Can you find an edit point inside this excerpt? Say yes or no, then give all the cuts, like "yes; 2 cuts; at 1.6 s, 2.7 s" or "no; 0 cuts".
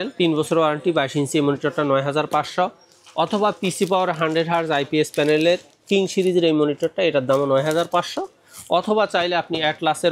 no; 0 cuts